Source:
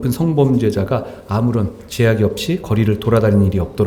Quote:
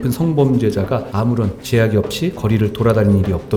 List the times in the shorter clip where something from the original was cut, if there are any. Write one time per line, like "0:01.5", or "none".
0:01.3